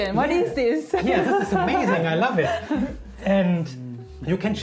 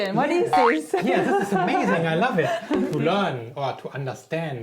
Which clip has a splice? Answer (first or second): second